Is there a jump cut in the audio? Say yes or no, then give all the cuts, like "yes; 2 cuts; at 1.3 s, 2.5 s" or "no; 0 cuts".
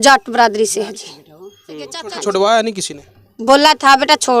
yes; 1 cut; at 2.1 s